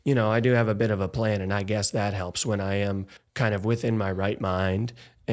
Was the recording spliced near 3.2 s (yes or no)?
yes